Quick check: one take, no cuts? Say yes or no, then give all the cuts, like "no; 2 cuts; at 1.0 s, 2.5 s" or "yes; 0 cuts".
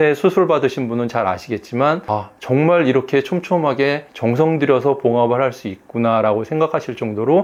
yes; 0 cuts